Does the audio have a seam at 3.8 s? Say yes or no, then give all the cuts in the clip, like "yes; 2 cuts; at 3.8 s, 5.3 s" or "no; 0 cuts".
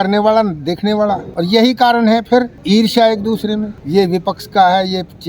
yes; 3 cuts; at 1.3 s, 2.6 s, 3.8 s